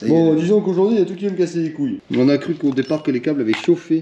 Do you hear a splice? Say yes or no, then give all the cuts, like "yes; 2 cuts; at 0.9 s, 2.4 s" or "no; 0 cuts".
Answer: yes; 1 cut; at 2.0 s